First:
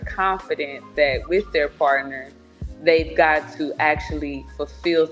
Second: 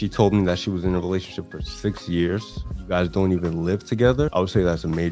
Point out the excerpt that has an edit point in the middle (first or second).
second